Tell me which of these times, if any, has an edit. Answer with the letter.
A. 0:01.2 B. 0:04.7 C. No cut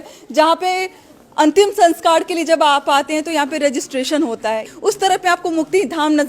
B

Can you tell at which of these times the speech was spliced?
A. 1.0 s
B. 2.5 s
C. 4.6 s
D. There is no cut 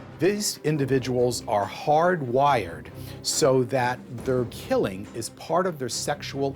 C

